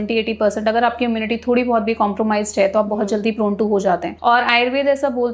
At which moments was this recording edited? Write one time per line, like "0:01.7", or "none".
0:04.1